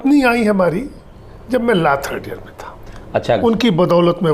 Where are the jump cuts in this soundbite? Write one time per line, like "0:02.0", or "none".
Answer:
0:03.4